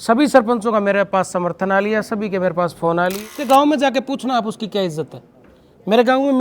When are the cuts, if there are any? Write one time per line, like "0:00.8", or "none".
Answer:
0:03.3